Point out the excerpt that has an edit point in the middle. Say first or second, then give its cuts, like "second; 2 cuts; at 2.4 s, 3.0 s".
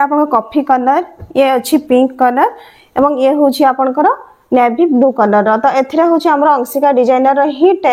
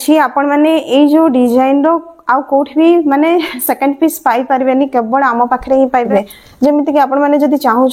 second; 1 cut; at 6.0 s